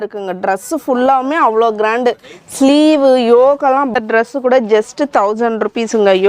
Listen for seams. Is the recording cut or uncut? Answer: cut